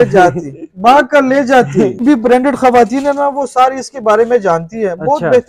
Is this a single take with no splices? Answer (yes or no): no